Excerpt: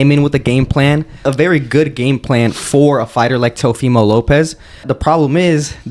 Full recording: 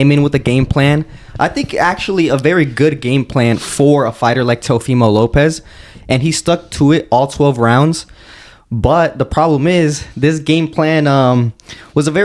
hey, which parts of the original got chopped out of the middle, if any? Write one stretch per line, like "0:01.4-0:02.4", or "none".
0:01.2-0:02.3
0:05.9-0:09.2